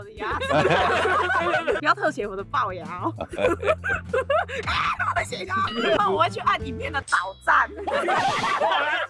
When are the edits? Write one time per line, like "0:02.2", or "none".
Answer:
0:01.8
0:06.0